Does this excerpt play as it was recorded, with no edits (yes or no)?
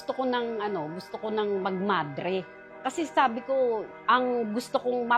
no